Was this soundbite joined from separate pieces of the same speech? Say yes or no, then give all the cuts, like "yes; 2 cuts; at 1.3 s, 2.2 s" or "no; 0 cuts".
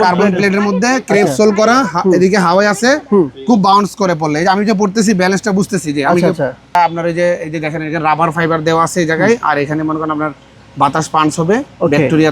yes; 1 cut; at 6.8 s